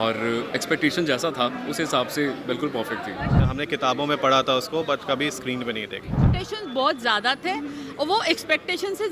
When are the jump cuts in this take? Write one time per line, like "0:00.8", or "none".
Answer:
0:03.4
0:06.3